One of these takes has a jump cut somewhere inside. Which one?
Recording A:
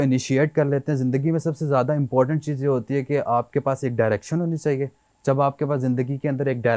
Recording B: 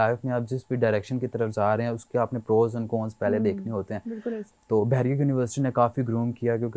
B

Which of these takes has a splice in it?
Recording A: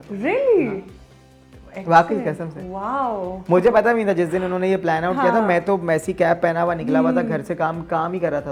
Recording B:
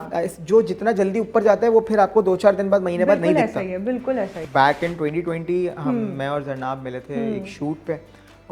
B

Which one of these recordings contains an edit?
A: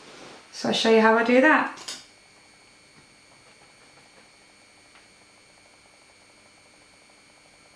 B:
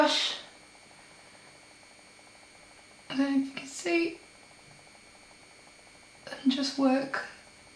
A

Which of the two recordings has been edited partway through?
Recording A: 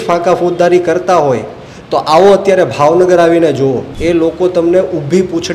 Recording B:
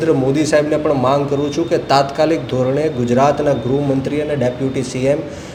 A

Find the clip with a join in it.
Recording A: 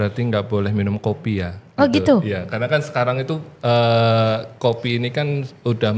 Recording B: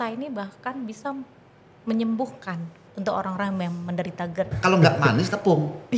B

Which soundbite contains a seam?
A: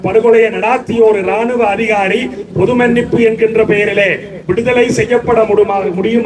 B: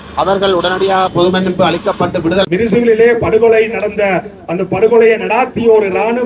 B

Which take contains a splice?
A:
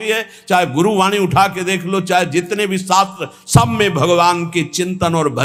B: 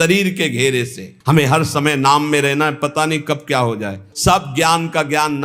B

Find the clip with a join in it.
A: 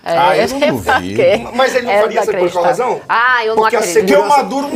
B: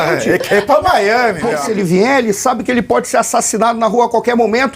B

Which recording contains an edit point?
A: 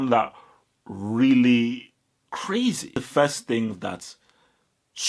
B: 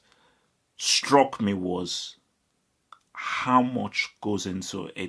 A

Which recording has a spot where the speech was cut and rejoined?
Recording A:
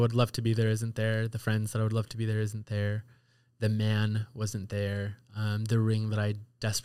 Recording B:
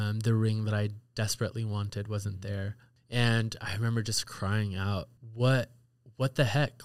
B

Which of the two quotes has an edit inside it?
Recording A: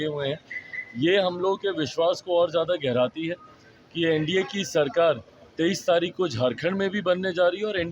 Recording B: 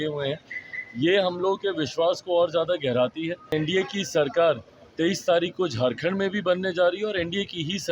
B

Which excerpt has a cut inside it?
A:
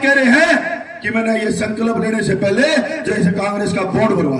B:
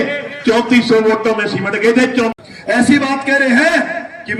B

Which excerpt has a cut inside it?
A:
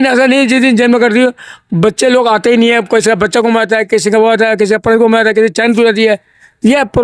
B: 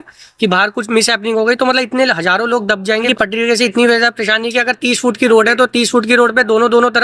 B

